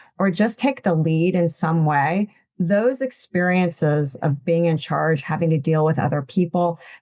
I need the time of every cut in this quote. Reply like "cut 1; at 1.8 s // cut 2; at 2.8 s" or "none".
none